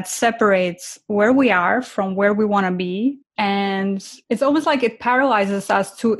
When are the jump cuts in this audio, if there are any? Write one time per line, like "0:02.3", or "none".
0:03.3
0:04.1